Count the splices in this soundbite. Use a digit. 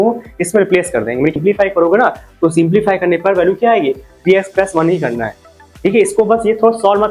1